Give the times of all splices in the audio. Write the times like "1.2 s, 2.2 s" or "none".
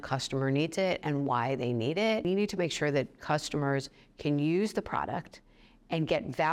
2.2 s